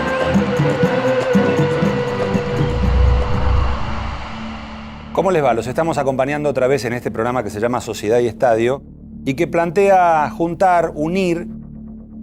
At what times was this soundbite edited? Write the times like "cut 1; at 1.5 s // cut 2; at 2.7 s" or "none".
none